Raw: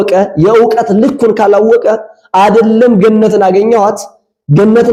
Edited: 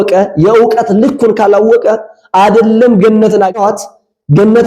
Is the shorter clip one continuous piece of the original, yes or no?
no